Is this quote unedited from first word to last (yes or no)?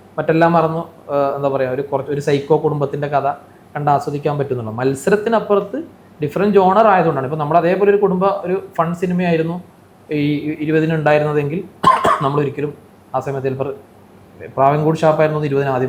yes